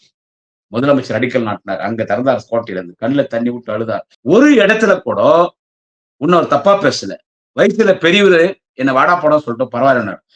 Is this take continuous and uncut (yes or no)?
no